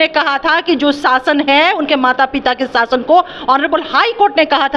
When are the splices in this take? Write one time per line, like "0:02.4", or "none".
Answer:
none